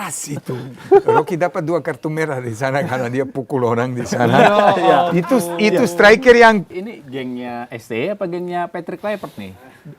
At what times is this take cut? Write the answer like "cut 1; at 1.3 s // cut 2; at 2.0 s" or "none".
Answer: cut 1; at 6.8 s

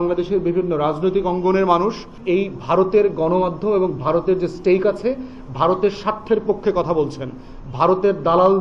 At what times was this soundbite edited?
cut 1; at 2.1 s

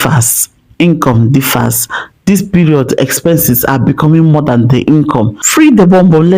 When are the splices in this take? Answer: cut 1; at 5.4 s

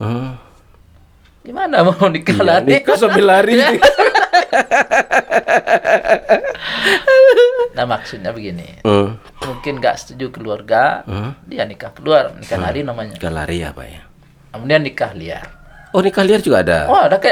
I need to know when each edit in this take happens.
none

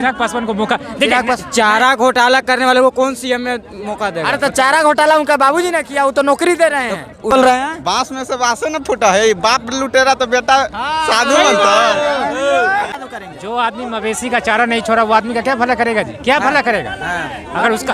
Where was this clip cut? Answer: cut 1; at 7.3 s // cut 2; at 13.0 s

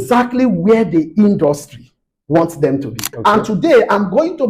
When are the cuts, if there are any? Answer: cut 1; at 3.1 s

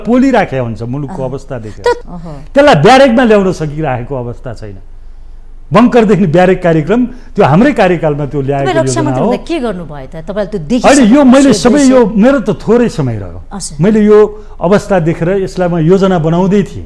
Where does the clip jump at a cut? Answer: cut 1; at 2.0 s

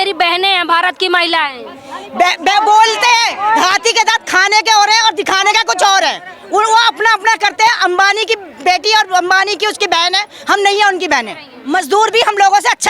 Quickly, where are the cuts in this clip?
cut 1; at 11.5 s

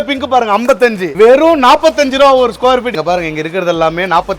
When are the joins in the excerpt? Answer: cut 1; at 1.1 s // cut 2; at 2.9 s

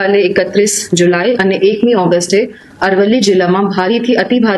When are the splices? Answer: none

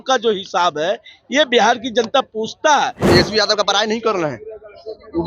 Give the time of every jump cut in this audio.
cut 1; at 3.0 s

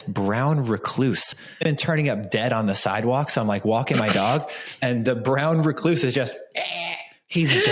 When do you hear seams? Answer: cut 1; at 1.6 s

